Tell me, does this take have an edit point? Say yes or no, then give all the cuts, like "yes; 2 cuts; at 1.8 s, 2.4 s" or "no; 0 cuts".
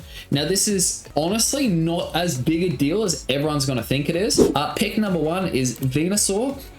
yes; 2 cuts; at 1.0 s, 4.4 s